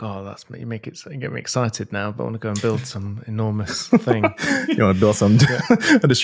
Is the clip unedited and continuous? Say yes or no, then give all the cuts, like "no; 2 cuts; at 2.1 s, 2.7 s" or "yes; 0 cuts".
yes; 0 cuts